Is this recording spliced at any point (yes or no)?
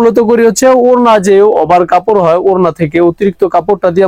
no